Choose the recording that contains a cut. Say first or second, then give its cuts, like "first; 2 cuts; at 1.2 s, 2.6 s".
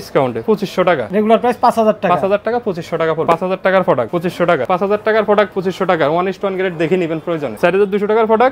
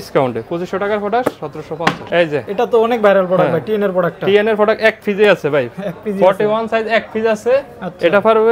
first; 5 cuts; at 0.9 s, 3.2 s, 4.6 s, 5.5 s, 7.5 s